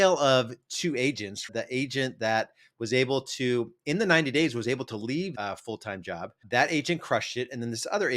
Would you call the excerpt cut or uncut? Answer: cut